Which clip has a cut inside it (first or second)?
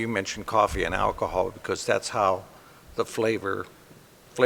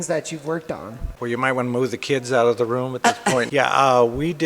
second